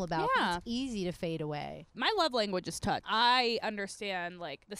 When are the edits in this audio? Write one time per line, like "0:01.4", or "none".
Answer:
0:01.9
0:03.0